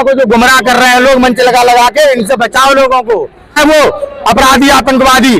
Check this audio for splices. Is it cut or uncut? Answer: cut